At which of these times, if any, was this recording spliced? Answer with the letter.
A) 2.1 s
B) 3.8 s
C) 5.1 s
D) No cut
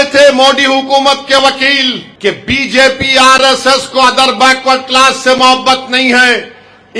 A